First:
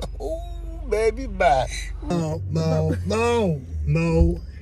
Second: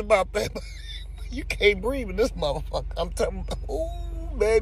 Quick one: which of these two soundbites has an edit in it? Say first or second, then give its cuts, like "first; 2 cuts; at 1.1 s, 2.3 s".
first; 1 cut; at 2.1 s